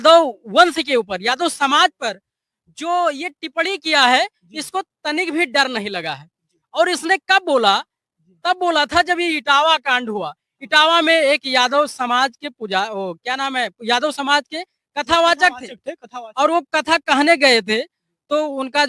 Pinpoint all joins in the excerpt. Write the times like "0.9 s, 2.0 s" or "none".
none